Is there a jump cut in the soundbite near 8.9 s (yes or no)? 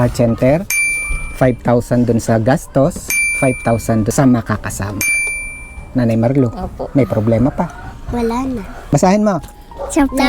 yes